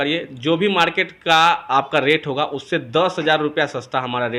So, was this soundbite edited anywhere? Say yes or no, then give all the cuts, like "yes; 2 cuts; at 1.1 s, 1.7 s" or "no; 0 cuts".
no; 0 cuts